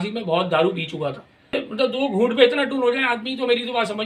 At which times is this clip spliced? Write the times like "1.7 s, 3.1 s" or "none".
1.6 s